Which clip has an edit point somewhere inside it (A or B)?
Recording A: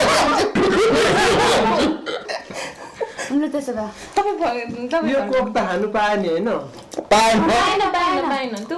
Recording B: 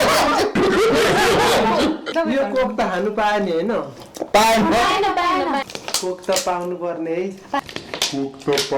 B